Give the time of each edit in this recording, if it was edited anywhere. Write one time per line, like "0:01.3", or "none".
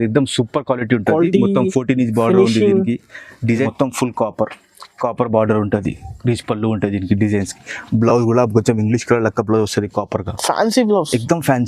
0:03.6